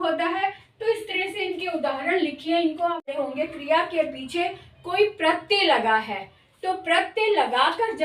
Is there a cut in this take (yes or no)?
yes